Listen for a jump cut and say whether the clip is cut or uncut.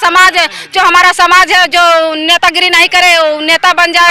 uncut